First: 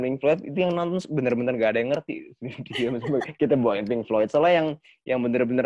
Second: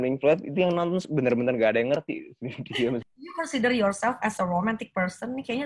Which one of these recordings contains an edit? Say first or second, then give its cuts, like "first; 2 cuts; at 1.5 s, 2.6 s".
second; 1 cut; at 3.0 s